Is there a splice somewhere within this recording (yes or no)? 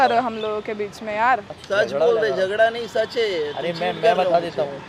no